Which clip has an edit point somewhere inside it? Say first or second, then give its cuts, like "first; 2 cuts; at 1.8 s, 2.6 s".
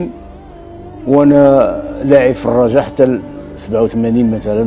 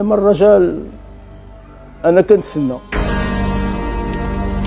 second; 1 cut; at 2.9 s